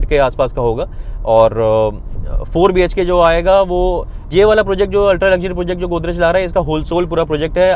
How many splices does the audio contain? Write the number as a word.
one